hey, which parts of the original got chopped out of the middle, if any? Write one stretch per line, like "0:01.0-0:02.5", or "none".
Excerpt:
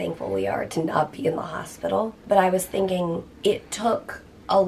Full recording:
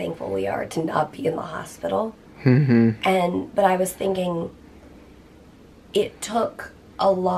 0:02.2-0:03.5
0:04.6-0:05.8